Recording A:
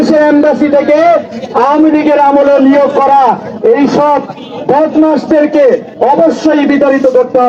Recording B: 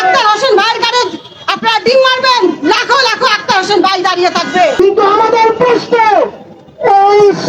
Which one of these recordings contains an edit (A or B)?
B